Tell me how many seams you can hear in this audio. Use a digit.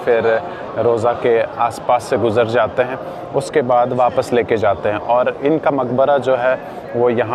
0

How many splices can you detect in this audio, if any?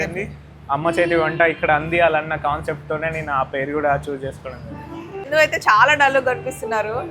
1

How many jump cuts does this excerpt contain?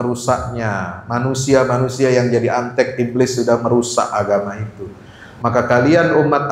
0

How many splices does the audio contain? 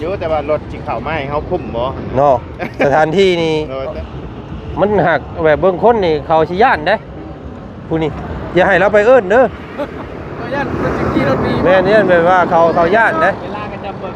1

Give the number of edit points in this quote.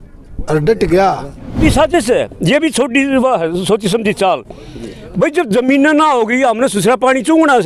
1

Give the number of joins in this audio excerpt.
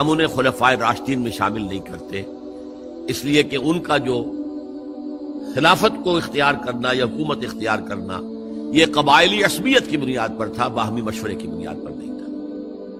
0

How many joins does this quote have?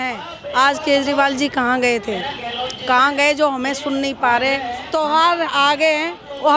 1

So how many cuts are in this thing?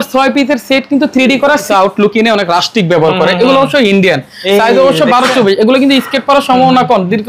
1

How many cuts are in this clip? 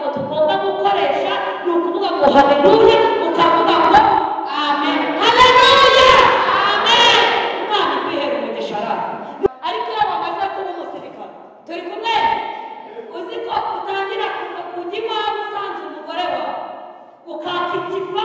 1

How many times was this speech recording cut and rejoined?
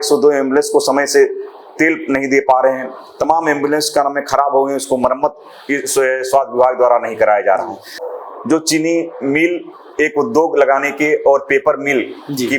1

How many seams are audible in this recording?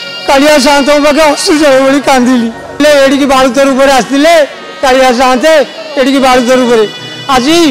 1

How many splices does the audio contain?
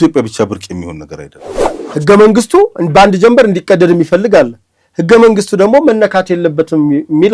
1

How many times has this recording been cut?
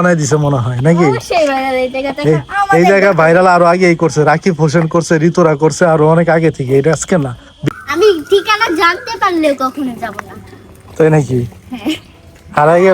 1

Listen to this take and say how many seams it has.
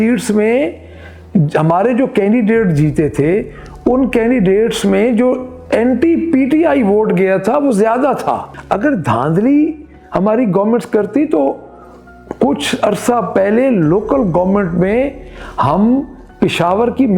1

